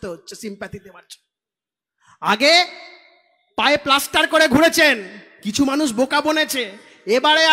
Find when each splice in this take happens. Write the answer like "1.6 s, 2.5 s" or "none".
none

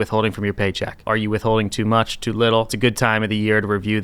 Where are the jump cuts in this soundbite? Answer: 1.0 s, 2.7 s

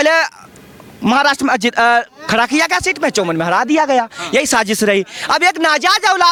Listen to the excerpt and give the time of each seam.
none

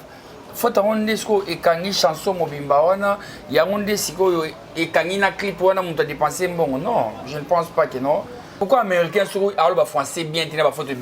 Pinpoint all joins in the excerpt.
8.6 s

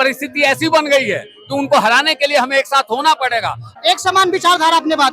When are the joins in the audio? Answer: 3.6 s

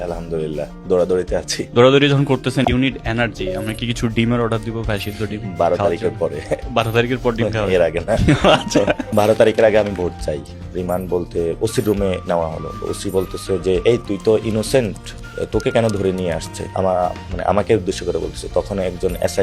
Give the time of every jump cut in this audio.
1.6 s, 2.6 s, 6.7 s, 9.0 s, 10.5 s, 13.8 s, 16.6 s

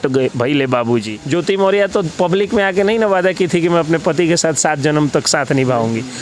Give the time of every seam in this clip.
1.1 s

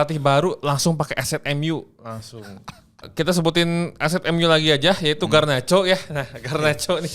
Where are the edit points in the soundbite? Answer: 3.0 s

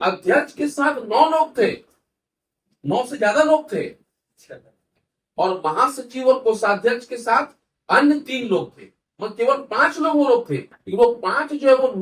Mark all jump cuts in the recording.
none

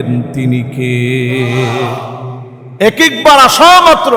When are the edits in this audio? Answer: none

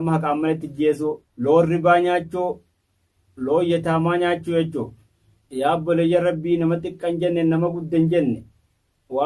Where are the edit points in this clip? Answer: none

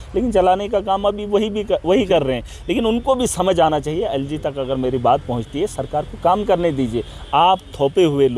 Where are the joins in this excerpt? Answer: none

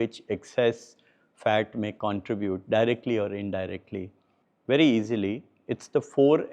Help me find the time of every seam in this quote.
none

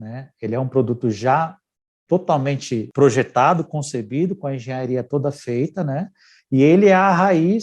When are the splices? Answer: 2.9 s

